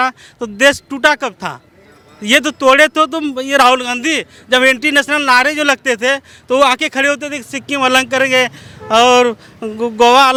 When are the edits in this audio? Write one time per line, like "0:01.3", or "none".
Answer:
none